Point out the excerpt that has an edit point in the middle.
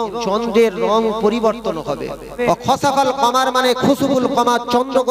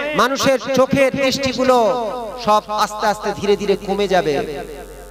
first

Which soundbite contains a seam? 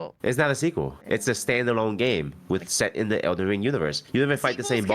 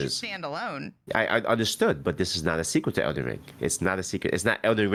first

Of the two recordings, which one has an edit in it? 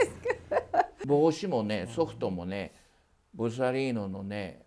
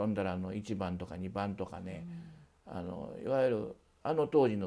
first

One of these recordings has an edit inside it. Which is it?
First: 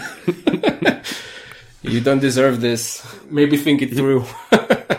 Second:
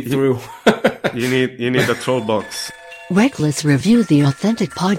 second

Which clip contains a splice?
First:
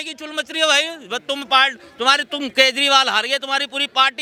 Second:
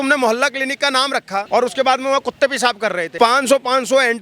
second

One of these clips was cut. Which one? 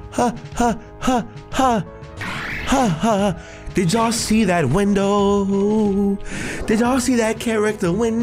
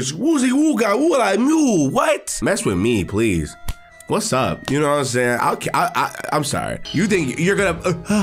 second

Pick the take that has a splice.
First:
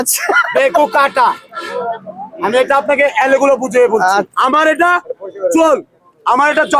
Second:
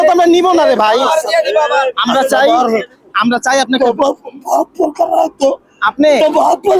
first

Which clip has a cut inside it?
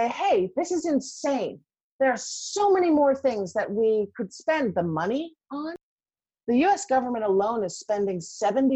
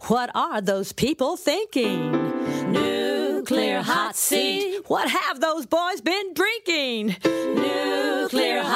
first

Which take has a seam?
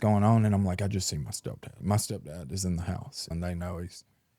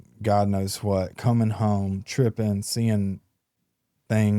first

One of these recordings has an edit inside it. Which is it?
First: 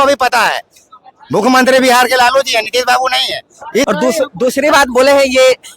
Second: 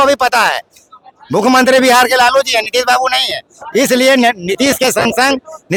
first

